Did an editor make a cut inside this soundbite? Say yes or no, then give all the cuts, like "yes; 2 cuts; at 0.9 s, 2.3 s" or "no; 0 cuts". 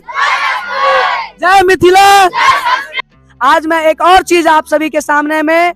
yes; 1 cut; at 2.9 s